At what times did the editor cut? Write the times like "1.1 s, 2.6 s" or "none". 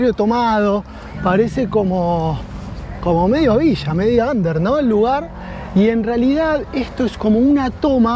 none